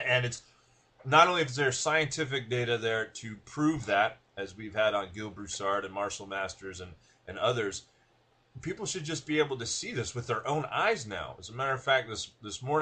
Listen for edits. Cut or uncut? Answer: cut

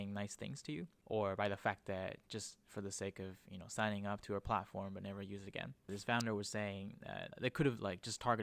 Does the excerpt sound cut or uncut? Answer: cut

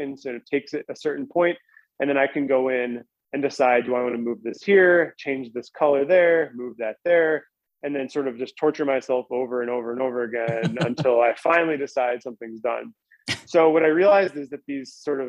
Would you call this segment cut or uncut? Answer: uncut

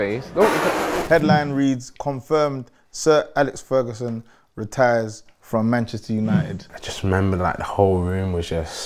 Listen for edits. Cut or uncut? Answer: cut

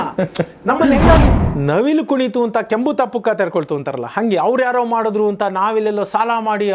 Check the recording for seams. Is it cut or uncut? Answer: cut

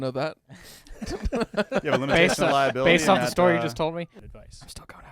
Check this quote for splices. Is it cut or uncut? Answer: cut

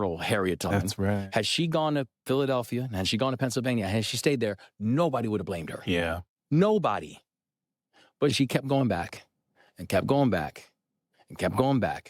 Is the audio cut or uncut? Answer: cut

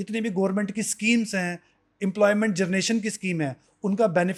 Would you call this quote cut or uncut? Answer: uncut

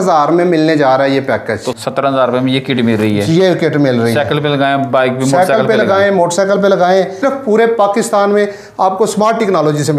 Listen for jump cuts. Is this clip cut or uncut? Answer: cut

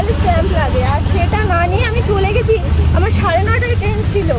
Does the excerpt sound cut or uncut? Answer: uncut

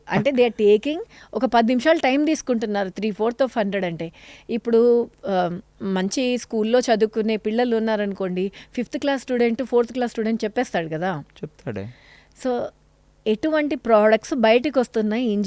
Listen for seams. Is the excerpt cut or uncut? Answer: uncut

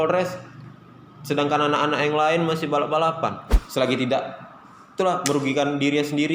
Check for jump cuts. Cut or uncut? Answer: cut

